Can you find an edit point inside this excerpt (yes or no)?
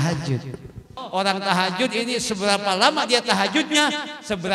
yes